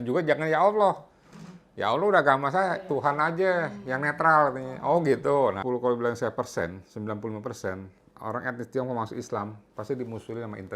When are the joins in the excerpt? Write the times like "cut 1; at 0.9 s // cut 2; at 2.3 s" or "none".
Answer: cut 1; at 5.6 s